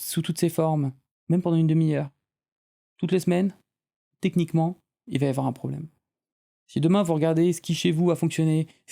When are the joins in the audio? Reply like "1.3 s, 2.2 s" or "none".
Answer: 1.1 s, 5.0 s